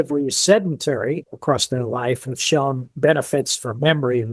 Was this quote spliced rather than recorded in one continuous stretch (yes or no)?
yes